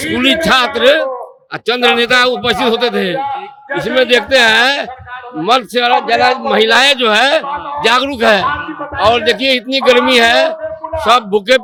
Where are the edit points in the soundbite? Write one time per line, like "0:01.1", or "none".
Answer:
none

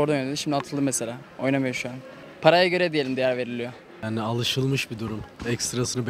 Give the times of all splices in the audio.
0:04.0

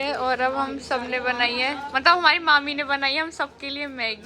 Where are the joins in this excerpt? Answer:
none

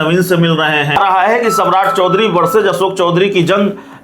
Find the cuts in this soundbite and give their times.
0:01.0

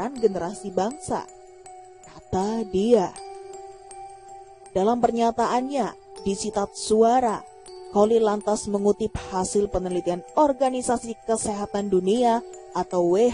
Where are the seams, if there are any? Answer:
none

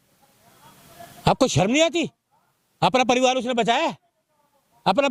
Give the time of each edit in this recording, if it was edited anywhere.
none

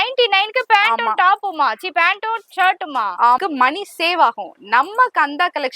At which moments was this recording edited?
0:03.4

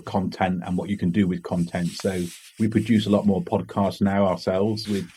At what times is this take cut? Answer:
none

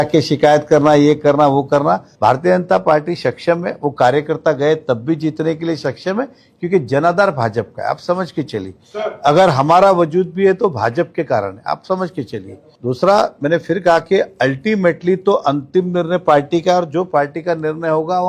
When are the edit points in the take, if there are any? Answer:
0:02.1

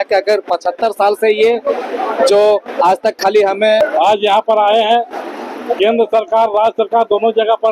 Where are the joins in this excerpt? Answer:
0:03.8

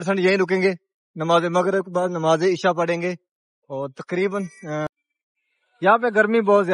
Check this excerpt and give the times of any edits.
0:04.9

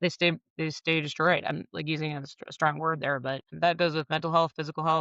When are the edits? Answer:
0:03.5

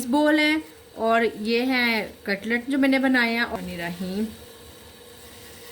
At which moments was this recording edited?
0:03.5

